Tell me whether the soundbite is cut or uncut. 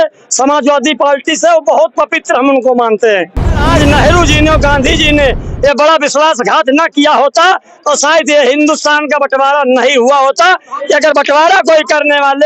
cut